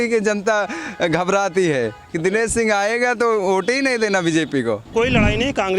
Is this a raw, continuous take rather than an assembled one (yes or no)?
no